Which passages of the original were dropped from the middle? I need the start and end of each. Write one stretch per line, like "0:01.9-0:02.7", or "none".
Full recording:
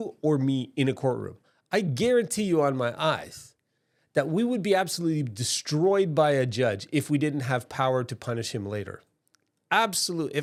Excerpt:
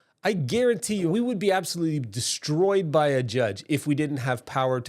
0:02.6-0:04.3